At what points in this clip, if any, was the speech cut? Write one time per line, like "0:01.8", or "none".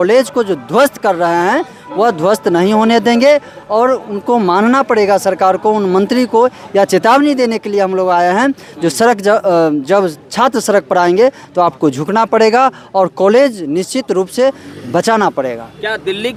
none